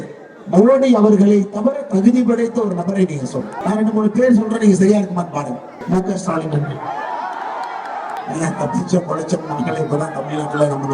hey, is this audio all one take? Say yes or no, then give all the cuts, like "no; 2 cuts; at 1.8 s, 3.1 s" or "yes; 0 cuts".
no; 3 cuts; at 3.5 s, 5.7 s, 8.2 s